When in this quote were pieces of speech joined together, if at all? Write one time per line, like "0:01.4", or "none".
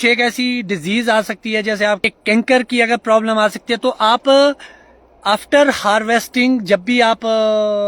0:02.1